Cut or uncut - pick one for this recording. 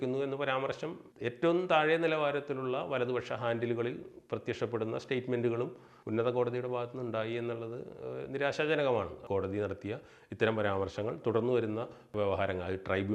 cut